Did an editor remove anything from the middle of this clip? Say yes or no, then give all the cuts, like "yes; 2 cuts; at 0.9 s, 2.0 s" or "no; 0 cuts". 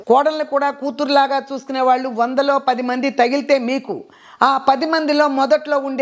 no; 0 cuts